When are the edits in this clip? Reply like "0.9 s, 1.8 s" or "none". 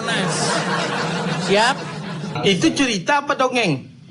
2.4 s